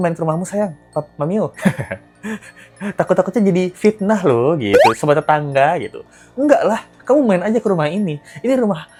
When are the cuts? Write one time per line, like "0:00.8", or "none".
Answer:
none